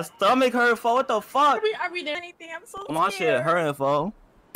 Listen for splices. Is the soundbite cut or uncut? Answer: cut